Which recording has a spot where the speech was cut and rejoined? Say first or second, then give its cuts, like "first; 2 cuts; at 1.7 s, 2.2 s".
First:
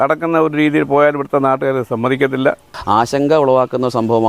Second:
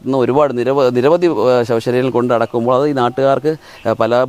first; 1 cut; at 2.7 s